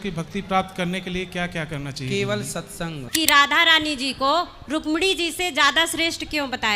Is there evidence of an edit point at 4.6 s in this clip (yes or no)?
no